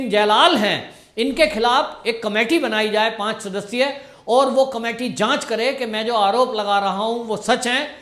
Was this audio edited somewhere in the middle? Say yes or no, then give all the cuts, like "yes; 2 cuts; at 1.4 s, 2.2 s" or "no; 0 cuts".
no; 0 cuts